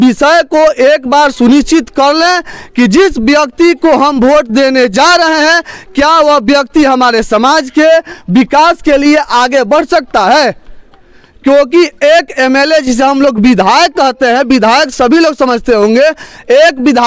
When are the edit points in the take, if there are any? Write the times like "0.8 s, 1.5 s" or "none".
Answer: none